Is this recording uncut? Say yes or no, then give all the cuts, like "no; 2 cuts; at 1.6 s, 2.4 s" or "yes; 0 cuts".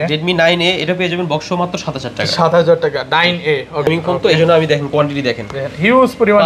no; 1 cut; at 3.9 s